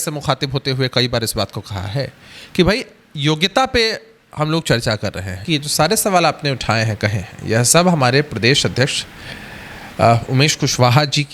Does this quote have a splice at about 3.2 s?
no; 1 cut; at 5.4 s

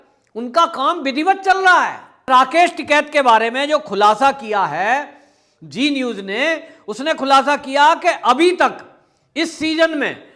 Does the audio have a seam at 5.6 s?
no; 1 cut; at 2.2 s

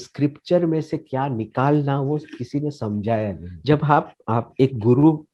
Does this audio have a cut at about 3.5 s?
yes; 1 cut; at 3.5 s

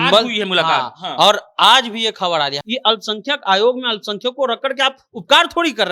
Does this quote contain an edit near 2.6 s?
yes; 1 cut; at 2.6 s

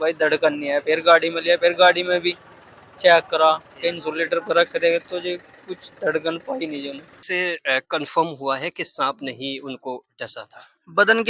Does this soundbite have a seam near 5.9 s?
no; 1 cut; at 7.3 s

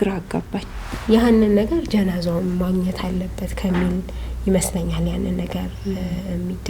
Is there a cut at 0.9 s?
yes; 1 cut; at 0.9 s

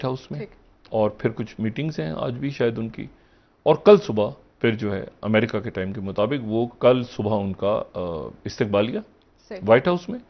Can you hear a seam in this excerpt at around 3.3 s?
no; 0 cuts

